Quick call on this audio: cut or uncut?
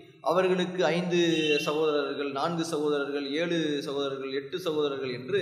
uncut